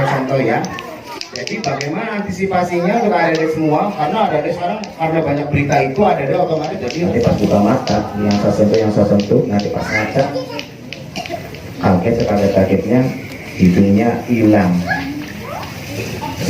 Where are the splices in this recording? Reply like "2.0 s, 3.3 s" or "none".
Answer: 6.8 s